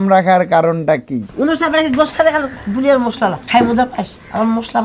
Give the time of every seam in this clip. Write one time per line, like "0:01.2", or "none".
0:01.2
0:03.4